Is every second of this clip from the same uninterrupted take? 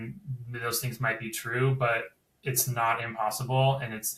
yes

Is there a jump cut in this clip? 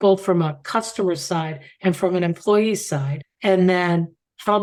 no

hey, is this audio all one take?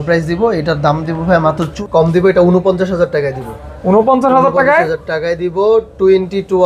no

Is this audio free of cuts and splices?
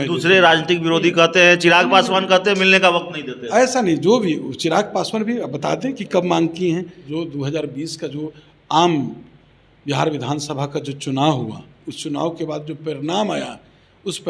no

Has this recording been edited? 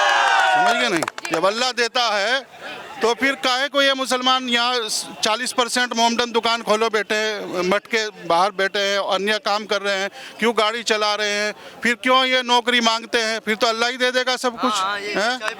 no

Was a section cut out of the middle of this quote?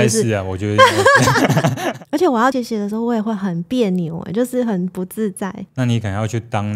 yes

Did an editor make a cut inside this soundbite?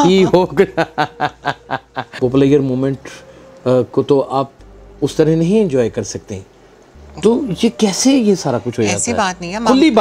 yes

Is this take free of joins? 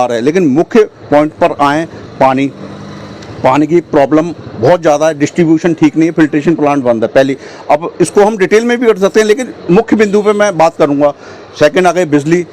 yes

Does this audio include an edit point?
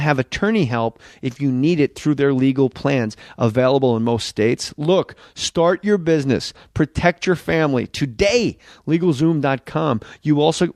yes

